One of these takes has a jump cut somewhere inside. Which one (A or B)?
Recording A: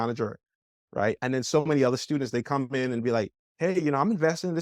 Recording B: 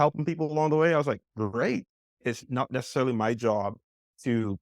B